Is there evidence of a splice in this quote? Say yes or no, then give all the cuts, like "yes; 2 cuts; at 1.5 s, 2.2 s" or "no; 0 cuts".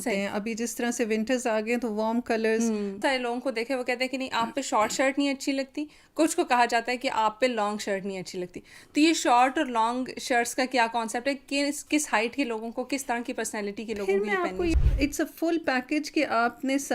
yes; 2 cuts; at 3.0 s, 14.7 s